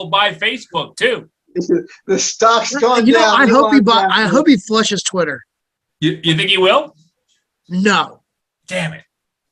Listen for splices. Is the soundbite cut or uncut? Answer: uncut